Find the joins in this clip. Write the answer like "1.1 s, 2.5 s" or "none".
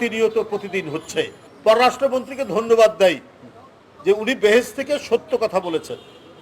1.4 s